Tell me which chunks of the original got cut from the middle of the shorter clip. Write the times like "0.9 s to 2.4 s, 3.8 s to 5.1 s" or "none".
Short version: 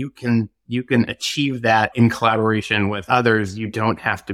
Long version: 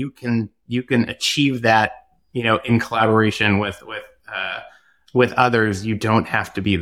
1.9 s to 2.6 s, 3.7 s to 5.3 s